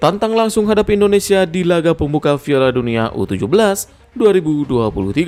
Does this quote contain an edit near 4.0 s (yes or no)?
no